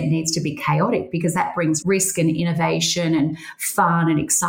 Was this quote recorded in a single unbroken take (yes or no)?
yes